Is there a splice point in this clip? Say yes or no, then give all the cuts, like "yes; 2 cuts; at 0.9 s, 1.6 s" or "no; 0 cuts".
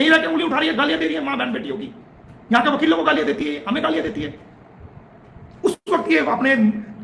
no; 0 cuts